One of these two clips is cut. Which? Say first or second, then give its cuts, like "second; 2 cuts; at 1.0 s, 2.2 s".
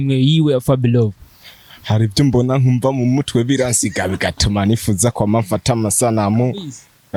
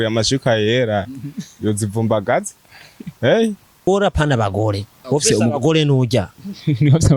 second; 1 cut; at 3.9 s